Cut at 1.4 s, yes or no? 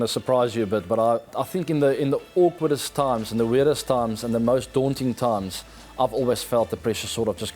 yes